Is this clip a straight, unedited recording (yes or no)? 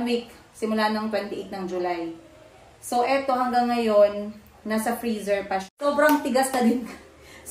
no